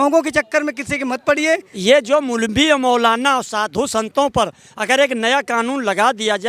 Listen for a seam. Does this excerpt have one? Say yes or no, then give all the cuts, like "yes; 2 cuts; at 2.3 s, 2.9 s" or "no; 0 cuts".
yes; 1 cut; at 1.7 s